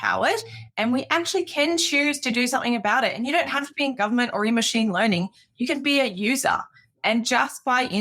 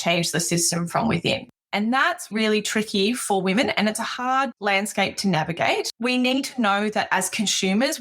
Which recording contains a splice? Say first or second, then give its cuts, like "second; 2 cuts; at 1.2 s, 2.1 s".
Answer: second; 3 cuts; at 1.6 s, 4.6 s, 5.9 s